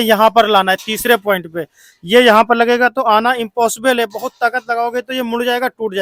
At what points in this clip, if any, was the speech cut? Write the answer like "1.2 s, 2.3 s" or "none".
none